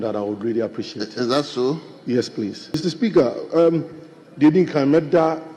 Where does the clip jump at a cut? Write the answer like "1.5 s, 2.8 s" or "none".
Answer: 2.8 s